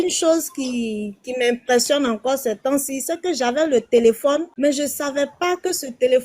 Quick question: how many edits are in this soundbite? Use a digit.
1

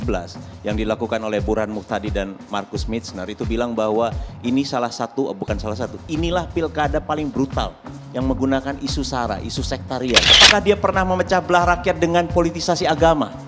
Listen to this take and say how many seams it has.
1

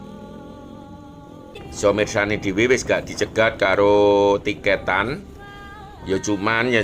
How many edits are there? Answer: 1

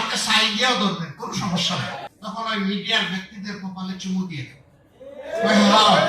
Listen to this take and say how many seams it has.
1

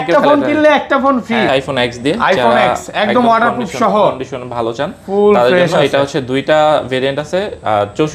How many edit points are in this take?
1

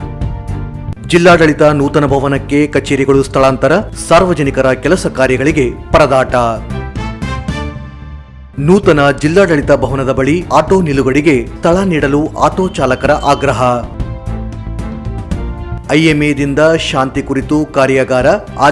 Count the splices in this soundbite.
1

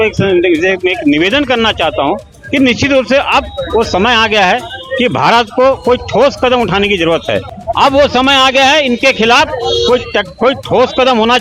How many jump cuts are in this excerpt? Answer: 1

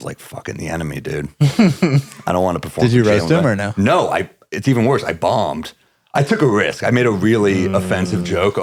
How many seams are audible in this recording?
0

